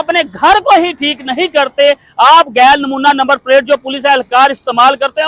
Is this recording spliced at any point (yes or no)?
no